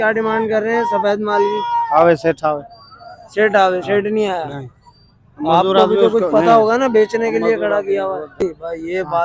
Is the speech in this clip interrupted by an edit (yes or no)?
yes